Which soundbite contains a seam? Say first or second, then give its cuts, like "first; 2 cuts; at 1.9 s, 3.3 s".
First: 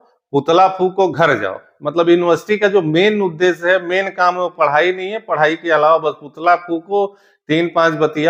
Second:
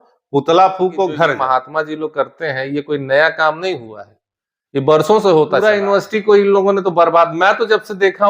second; 2 cuts; at 1.4 s, 5.6 s